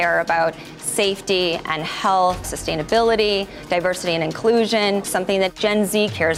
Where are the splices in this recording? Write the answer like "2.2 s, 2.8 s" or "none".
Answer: 2.6 s, 5.3 s